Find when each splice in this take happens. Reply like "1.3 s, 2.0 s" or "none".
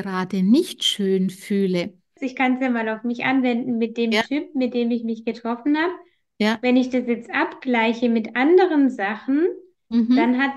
2.2 s